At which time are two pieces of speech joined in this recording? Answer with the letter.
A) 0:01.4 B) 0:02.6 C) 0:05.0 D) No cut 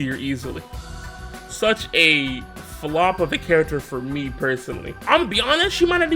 C